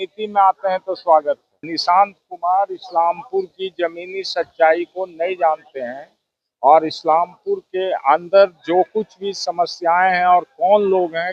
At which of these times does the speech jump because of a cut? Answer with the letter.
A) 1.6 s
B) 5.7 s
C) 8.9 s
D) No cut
A